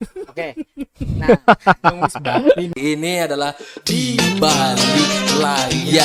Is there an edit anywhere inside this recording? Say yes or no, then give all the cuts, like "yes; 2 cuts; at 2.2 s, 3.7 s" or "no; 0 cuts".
yes; 1 cut; at 2.7 s